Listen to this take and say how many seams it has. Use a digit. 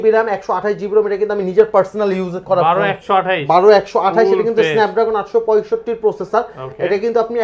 0